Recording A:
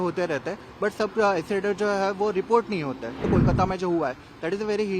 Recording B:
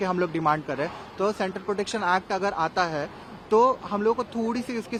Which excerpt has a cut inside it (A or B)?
A